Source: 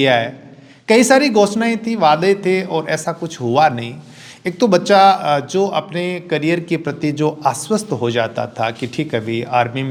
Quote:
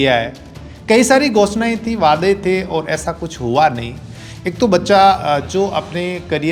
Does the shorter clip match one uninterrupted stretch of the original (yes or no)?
yes